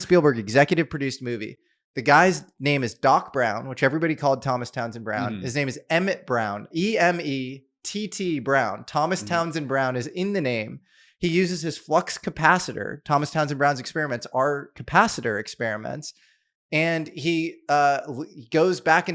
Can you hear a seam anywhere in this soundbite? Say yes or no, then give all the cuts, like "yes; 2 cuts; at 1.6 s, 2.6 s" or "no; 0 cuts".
no; 0 cuts